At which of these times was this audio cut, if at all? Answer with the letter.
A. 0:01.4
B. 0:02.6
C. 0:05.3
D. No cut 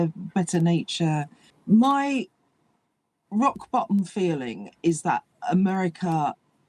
A